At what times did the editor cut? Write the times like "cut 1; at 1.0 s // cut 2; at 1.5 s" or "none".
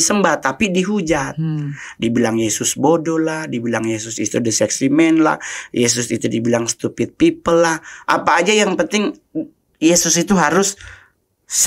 none